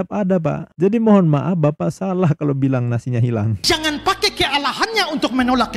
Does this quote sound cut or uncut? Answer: cut